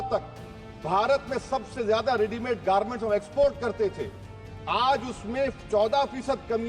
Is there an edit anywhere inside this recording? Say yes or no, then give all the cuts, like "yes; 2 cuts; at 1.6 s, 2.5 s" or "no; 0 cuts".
no; 0 cuts